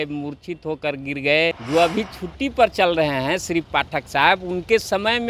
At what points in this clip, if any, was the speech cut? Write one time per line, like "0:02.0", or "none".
0:01.6